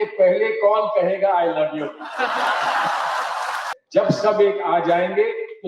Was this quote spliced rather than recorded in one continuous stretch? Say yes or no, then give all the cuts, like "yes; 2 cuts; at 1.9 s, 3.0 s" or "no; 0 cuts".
yes; 1 cut; at 3.7 s